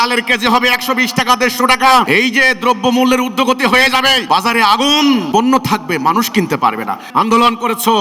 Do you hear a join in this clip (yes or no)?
yes